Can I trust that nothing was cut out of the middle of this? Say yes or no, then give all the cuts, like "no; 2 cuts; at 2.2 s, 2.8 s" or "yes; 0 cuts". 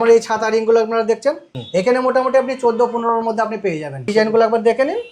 no; 2 cuts; at 1.5 s, 4.1 s